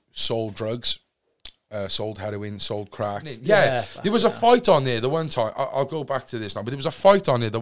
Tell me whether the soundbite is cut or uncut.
cut